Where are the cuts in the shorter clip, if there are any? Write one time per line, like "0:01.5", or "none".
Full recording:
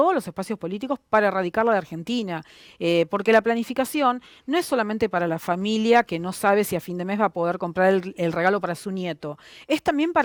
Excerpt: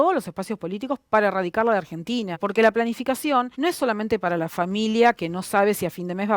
0:02.4
0:03.5

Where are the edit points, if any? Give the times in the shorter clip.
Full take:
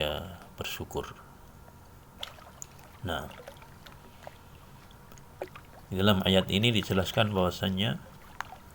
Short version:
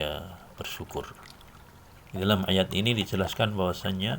0:01.9

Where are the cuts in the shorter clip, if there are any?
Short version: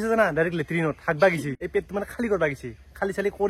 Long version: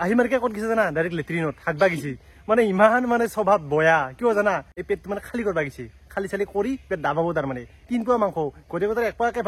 0:01.6

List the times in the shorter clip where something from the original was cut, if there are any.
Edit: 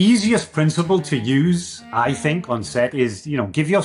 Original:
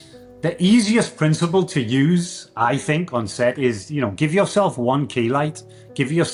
none

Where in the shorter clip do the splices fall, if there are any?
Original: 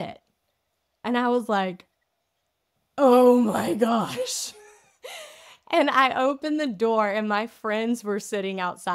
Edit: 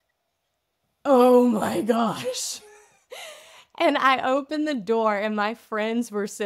none

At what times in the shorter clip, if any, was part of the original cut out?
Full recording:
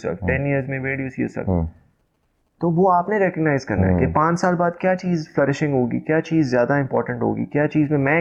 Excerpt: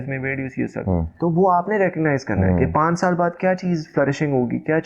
0:01.1

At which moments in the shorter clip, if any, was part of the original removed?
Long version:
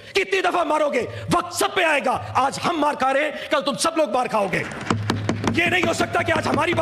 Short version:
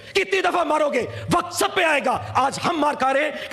none

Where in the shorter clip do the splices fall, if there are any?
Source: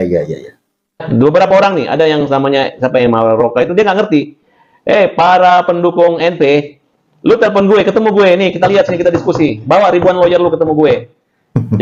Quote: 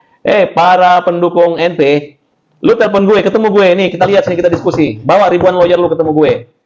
none

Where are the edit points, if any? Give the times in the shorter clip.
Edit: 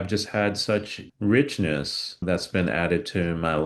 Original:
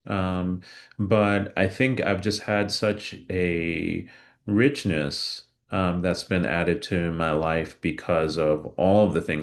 0:01.0
0:02.2

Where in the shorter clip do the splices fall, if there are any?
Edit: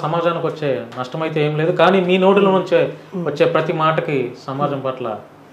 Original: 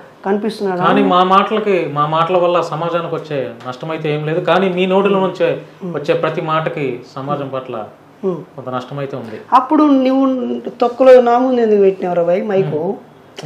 none

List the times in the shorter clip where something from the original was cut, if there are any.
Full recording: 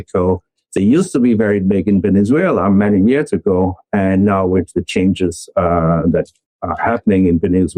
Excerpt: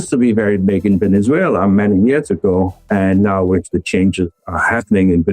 0:04.4

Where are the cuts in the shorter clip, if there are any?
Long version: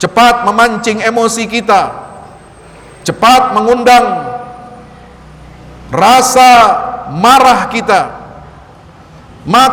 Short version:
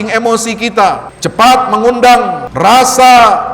0:01.1
0:02.4

